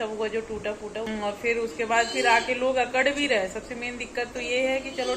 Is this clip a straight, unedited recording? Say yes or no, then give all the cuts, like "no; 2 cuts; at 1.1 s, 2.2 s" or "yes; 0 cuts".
no; 1 cut; at 1.1 s